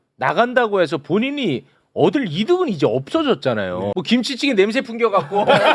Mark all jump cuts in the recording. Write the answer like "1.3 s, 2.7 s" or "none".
4.0 s